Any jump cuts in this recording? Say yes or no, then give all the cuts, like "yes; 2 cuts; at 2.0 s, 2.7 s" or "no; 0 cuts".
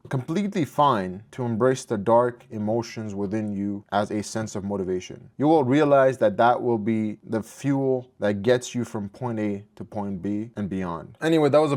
no; 0 cuts